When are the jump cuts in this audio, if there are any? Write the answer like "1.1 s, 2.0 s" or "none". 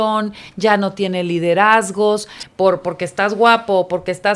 2.4 s